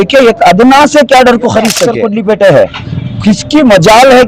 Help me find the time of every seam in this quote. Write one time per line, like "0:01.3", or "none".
0:01.9